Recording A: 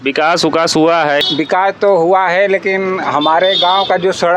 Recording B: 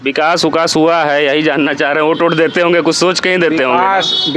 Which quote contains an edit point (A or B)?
A